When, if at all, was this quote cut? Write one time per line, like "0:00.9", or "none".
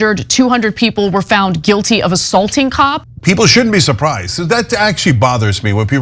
0:03.1

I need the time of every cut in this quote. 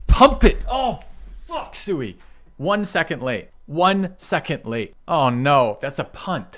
0:03.5
0:04.9

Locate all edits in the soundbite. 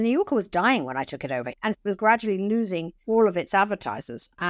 0:01.5
0:02.9

